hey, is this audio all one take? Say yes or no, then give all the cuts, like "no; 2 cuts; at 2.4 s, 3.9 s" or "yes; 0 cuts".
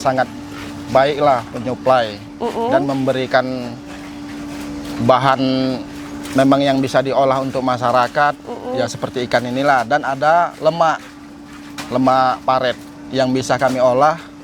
yes; 0 cuts